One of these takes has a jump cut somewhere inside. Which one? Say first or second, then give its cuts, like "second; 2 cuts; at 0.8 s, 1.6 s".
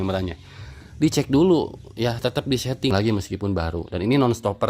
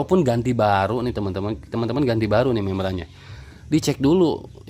first; 1 cut; at 2.9 s